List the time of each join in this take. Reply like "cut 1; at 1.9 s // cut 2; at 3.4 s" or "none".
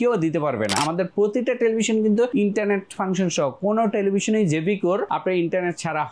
cut 1; at 0.8 s // cut 2; at 2.3 s // cut 3; at 5.1 s